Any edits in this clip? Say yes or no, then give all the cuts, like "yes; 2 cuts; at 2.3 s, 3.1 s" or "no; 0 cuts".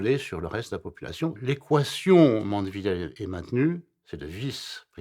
yes; 2 cuts; at 1.4 s, 3.1 s